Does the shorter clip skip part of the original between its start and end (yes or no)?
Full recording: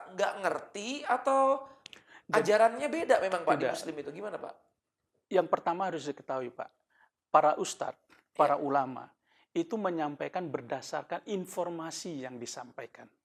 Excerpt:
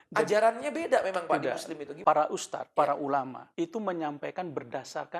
yes